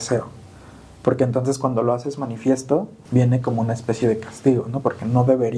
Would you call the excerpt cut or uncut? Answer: cut